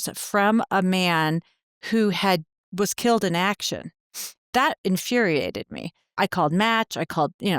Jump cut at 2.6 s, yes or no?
no